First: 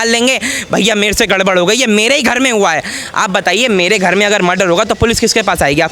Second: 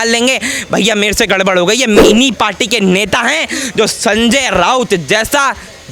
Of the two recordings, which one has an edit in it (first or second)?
second